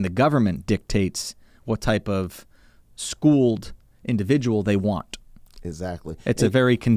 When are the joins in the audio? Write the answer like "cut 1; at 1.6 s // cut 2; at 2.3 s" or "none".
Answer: none